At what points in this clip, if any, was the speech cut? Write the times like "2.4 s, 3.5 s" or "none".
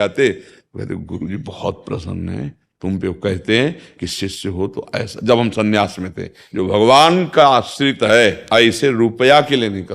6.4 s, 8.4 s

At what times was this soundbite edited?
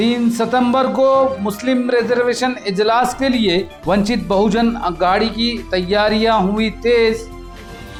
none

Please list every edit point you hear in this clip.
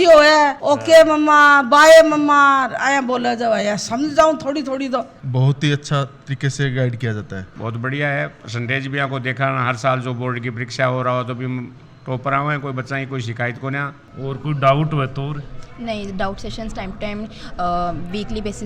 5.2 s, 7.5 s, 14.1 s

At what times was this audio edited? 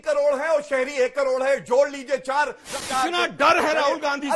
2.7 s

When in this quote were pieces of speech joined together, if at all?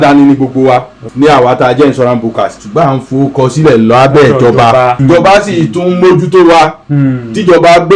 1.0 s, 2.6 s, 5.0 s

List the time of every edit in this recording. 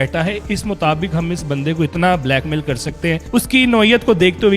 3.2 s

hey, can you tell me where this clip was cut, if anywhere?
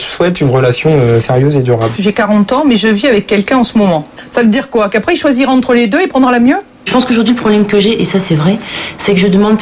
1.9 s, 4.1 s, 6.9 s

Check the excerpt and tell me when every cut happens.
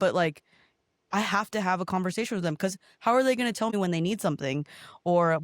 3.7 s

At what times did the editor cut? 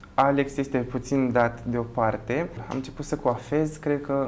2.7 s

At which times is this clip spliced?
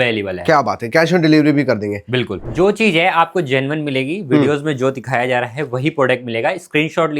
2.4 s

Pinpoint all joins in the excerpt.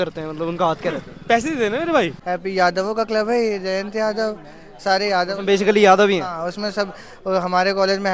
2.2 s

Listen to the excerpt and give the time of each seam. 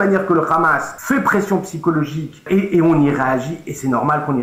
0.9 s, 2.4 s

